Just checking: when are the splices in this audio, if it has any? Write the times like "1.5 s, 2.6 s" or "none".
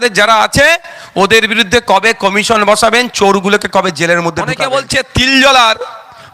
4.6 s